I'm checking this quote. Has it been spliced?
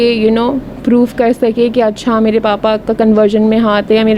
no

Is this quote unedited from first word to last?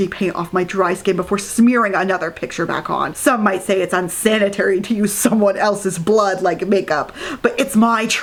yes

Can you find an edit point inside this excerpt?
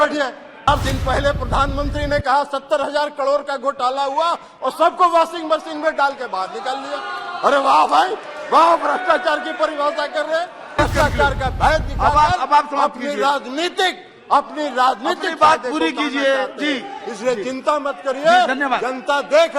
yes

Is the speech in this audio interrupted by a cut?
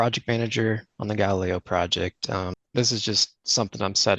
yes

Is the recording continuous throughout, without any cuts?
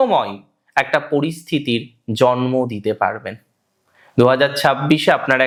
yes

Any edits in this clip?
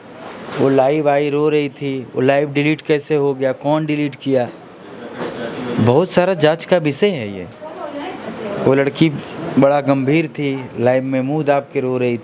no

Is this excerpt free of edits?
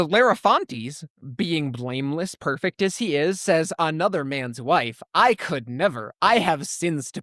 yes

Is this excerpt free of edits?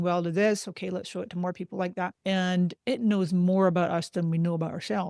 no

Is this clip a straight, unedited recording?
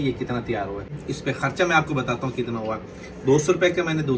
no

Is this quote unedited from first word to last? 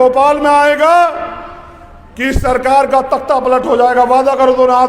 yes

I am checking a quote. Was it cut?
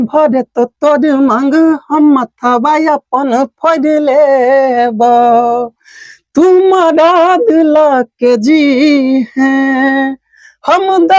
no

